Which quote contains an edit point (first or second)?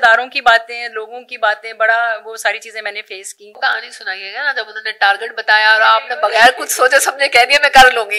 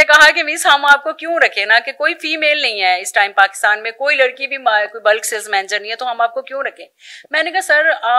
first